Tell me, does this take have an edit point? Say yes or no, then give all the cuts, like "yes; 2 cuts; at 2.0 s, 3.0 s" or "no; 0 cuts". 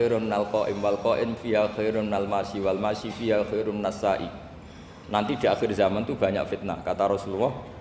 no; 0 cuts